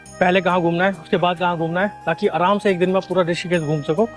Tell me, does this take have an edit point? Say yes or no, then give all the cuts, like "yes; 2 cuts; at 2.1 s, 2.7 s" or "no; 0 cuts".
no; 0 cuts